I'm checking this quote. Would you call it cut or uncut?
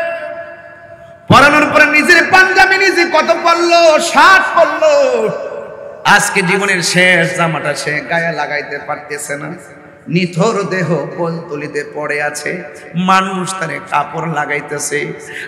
uncut